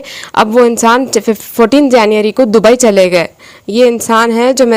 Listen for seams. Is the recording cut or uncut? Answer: uncut